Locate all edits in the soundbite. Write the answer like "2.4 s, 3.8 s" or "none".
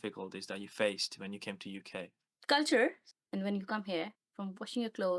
2.3 s, 3.1 s, 4.2 s